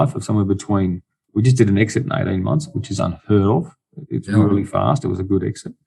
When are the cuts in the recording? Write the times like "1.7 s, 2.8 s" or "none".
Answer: none